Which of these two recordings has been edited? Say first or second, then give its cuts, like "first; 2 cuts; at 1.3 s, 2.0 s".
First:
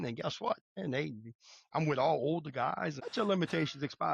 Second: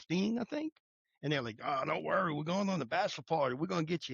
first; 2 cuts; at 0.7 s, 3.0 s